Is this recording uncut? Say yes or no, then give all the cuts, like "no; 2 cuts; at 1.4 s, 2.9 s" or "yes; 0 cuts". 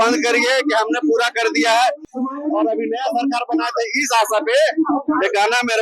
no; 1 cut; at 2.0 s